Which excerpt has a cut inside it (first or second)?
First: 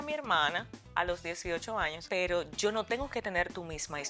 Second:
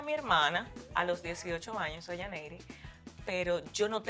first